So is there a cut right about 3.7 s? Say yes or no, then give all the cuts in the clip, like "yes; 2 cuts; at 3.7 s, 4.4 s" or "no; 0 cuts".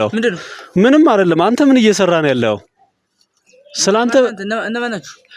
no; 0 cuts